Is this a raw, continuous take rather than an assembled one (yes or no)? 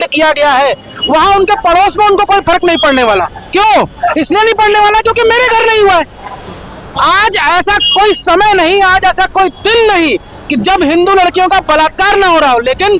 yes